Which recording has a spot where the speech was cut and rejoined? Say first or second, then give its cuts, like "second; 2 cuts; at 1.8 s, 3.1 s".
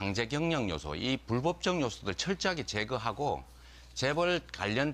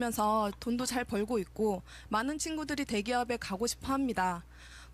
first; 1 cut; at 2.5 s